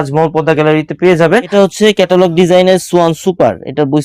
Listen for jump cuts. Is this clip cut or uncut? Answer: cut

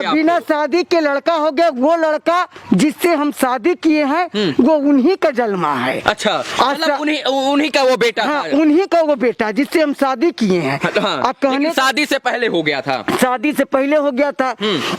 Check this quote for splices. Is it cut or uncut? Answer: uncut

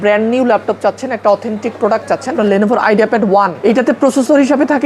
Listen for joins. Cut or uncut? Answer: cut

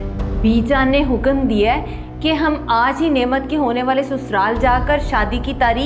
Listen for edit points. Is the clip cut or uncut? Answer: uncut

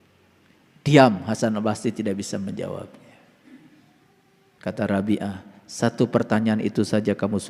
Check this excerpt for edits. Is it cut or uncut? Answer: cut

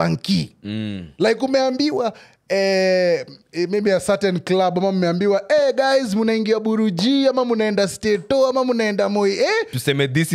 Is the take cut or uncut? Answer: uncut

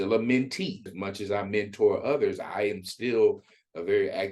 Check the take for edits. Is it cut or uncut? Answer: cut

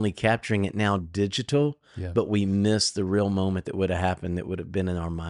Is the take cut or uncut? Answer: uncut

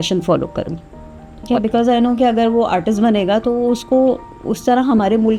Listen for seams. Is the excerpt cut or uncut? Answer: uncut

